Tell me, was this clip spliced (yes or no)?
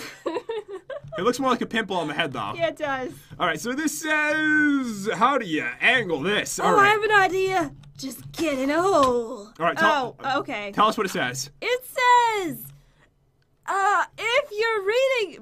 no